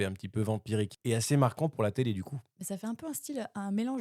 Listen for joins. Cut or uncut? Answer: cut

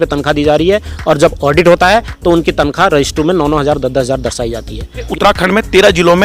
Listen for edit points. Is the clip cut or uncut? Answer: cut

